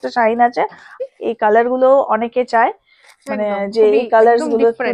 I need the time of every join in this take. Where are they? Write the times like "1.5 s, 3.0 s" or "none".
0.9 s